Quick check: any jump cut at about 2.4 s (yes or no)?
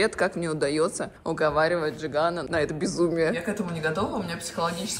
yes